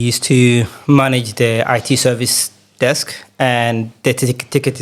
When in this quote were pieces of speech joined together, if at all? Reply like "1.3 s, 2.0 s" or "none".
none